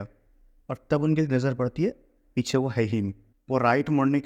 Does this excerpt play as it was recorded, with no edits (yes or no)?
yes